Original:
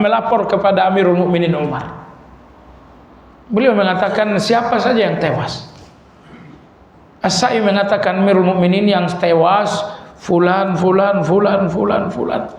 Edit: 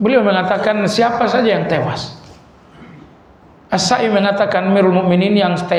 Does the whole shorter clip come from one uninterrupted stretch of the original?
yes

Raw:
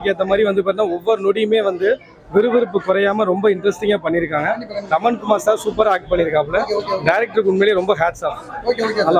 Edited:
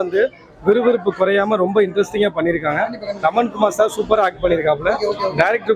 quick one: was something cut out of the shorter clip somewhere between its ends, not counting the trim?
no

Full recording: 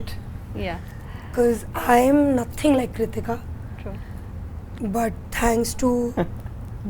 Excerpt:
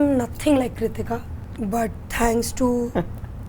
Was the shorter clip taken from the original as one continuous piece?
no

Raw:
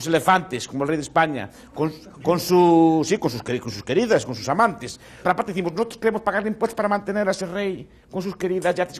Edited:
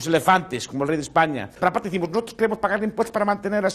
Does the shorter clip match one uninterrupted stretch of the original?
no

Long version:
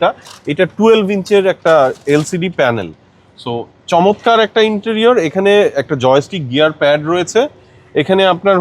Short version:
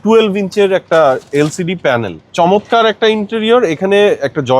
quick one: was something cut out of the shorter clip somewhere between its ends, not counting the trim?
yes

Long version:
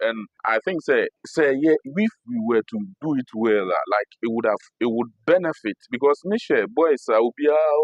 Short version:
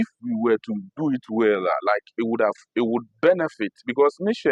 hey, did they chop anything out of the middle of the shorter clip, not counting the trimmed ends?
no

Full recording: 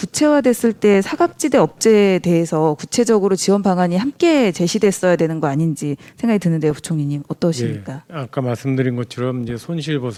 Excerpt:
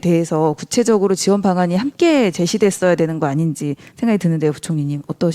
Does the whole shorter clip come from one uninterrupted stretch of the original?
yes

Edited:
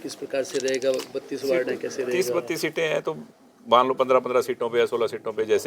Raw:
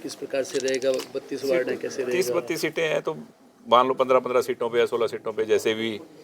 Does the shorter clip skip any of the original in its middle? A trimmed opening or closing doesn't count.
no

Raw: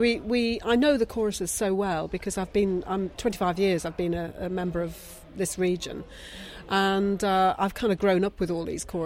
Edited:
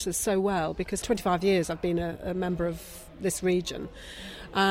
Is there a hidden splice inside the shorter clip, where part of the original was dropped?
yes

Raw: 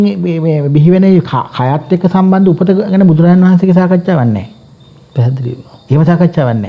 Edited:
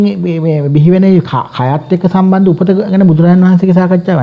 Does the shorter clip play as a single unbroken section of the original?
yes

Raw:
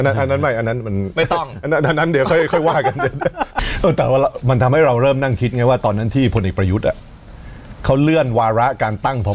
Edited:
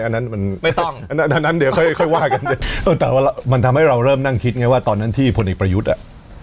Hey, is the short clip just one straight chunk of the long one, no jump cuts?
no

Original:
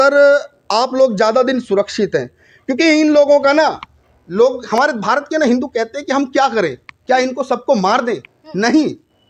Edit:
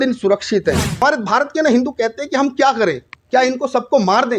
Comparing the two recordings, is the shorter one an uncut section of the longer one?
no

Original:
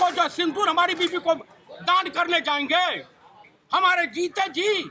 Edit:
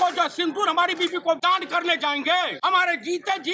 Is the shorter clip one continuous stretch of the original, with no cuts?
no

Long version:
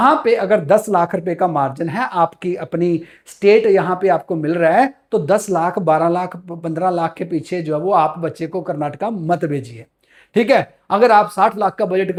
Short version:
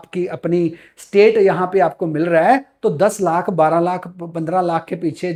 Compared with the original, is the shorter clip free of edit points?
yes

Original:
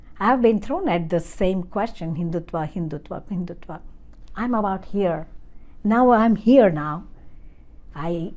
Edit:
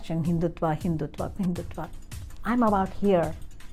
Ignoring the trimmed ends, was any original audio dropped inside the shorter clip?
no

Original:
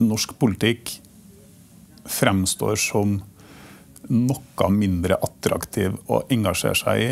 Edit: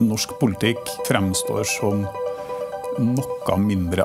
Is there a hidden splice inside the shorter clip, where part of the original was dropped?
yes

